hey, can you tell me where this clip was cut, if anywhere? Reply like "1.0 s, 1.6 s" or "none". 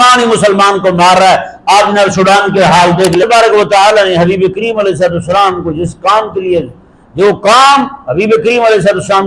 3.2 s